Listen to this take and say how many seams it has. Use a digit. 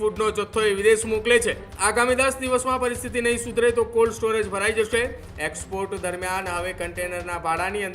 2